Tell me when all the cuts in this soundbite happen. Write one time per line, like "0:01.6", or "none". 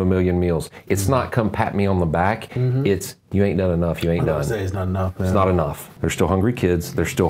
0:05.8